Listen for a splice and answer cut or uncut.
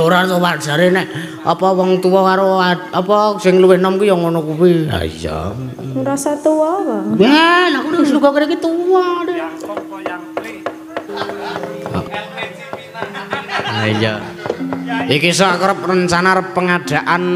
cut